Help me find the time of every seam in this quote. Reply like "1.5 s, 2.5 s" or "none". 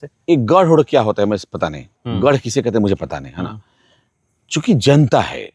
none